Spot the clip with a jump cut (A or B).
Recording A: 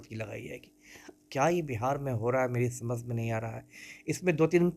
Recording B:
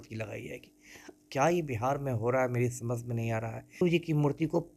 B